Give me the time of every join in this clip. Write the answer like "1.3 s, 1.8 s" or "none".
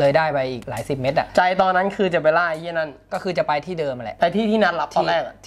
none